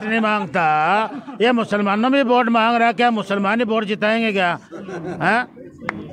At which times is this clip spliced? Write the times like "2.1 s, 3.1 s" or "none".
none